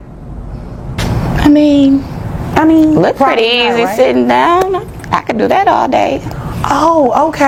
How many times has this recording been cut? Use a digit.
0